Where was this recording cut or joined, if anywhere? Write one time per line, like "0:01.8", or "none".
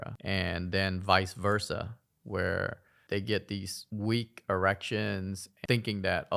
0:02.9
0:05.5